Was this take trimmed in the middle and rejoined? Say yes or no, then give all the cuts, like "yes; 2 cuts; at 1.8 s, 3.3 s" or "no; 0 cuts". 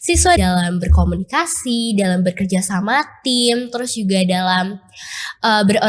no; 0 cuts